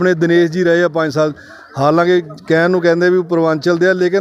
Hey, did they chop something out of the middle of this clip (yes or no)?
no